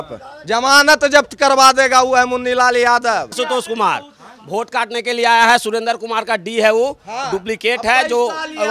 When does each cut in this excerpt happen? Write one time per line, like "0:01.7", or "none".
0:03.3